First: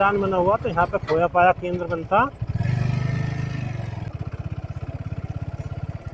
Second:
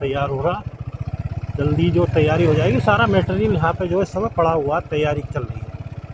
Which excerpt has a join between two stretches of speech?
first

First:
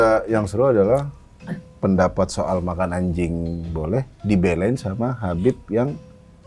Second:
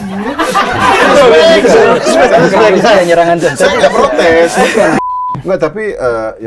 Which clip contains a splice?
second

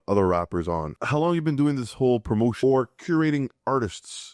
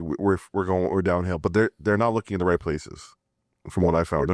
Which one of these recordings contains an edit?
first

